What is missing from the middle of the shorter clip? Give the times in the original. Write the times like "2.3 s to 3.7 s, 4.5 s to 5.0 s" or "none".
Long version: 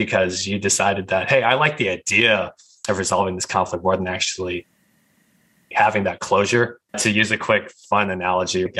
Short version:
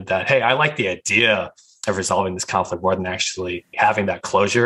4.7 s to 5.6 s